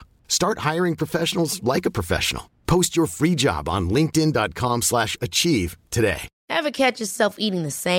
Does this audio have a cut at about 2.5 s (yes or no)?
no